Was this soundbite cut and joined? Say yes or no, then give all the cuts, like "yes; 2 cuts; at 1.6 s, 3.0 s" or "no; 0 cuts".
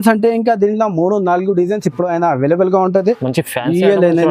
yes; 1 cut; at 3.2 s